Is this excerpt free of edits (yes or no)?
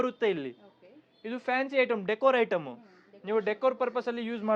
yes